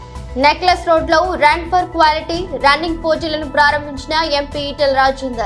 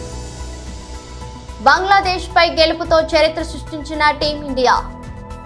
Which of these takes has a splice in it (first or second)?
second